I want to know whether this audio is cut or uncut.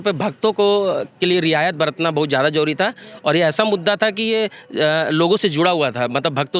uncut